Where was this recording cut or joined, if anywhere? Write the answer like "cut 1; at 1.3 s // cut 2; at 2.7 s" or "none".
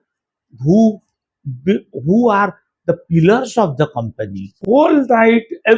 cut 1; at 4.6 s